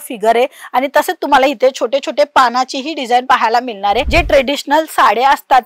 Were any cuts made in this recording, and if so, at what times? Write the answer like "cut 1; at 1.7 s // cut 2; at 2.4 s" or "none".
cut 1; at 4.1 s